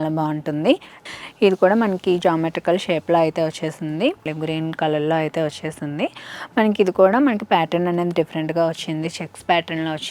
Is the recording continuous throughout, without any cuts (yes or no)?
no